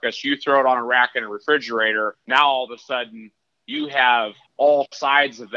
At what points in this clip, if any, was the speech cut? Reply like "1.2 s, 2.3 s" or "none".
2.2 s, 4.4 s

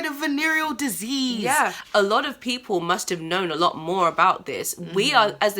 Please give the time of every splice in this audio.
1.8 s

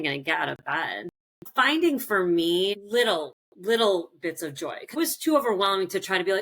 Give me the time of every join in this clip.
1.5 s, 4.9 s

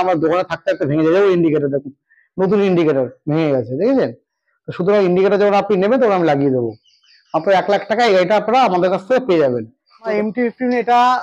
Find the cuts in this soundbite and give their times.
10.1 s

